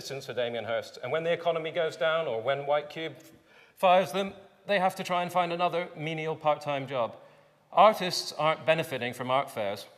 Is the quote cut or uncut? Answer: uncut